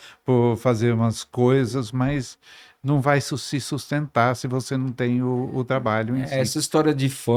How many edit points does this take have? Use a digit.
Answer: 0